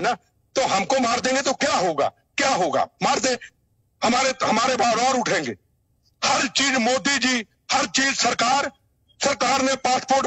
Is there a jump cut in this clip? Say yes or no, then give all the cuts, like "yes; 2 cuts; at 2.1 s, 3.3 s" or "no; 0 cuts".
no; 0 cuts